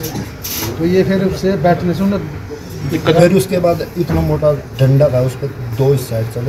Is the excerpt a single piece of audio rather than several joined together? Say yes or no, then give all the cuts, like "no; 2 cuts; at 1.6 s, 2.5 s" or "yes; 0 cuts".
yes; 0 cuts